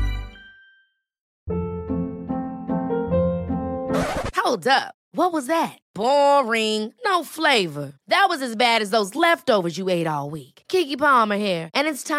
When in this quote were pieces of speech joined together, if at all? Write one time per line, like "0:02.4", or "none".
0:01.3